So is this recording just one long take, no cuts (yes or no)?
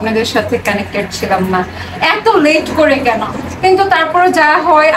yes